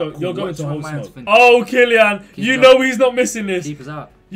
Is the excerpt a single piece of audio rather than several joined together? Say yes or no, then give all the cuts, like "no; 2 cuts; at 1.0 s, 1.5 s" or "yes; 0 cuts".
no; 1 cut; at 1.1 s